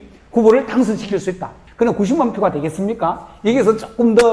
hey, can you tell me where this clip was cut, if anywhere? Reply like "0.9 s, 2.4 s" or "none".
1.5 s